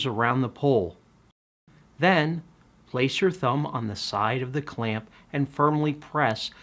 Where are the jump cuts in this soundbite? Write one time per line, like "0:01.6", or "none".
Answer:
0:01.5